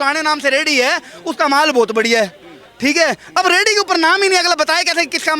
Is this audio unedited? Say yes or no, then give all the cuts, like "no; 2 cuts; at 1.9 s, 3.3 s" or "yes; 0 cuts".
yes; 0 cuts